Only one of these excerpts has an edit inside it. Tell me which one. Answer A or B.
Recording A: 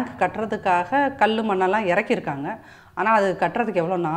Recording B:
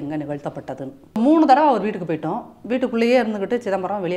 B